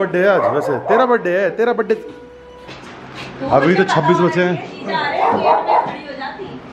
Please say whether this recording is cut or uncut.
uncut